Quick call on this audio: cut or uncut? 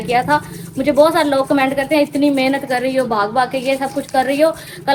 uncut